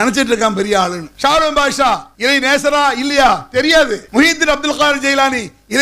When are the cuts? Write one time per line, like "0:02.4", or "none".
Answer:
0:01.0
0:02.1